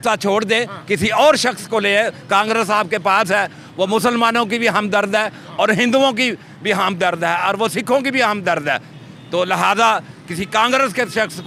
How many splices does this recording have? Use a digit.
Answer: 0